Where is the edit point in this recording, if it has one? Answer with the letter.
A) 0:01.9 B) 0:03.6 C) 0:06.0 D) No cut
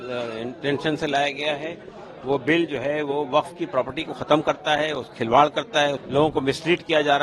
C